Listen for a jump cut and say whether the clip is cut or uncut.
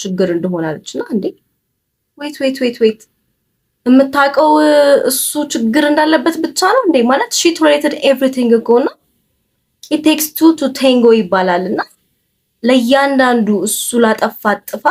uncut